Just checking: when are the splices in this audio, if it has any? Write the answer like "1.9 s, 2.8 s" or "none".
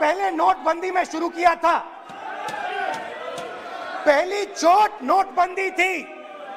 none